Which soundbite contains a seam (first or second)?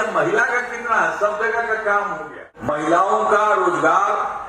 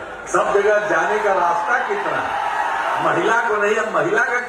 first